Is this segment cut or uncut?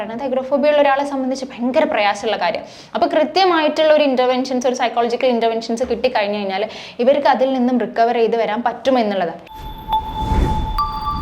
cut